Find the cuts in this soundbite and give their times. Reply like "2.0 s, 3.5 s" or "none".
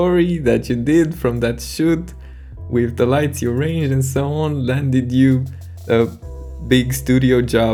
none